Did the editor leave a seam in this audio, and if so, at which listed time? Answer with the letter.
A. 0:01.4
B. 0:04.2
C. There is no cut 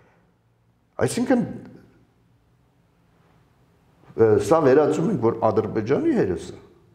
C